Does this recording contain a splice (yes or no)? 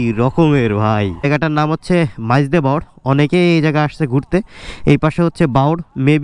yes